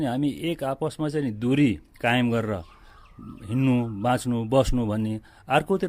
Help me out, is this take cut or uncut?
uncut